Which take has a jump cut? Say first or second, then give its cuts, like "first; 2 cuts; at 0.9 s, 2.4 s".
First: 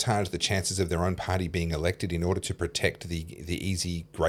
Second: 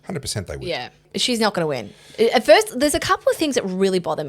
second; 1 cut; at 1.1 s